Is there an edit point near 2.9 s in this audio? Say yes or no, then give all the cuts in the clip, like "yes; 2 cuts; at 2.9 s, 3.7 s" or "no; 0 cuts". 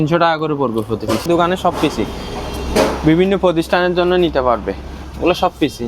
no; 1 cut; at 1.2 s